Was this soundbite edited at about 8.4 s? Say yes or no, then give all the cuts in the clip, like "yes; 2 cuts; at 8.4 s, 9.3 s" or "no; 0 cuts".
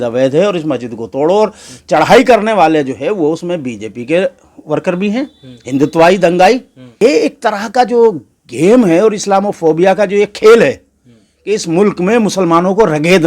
no; 1 cut; at 7.0 s